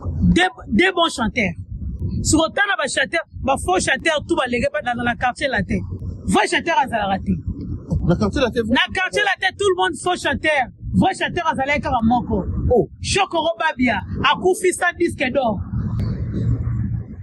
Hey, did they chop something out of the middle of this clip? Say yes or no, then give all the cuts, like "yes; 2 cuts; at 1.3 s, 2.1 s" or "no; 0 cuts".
no; 0 cuts